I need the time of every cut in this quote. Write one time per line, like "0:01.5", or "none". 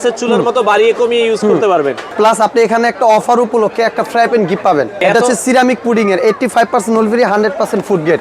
0:02.0
0:05.0